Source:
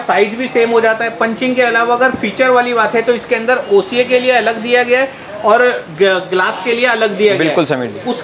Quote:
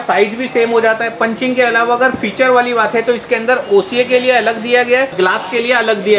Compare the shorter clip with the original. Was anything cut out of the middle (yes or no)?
yes